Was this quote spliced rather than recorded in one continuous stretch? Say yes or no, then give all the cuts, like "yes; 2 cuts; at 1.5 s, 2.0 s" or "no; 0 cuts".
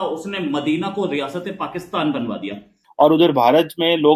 yes; 1 cut; at 2.8 s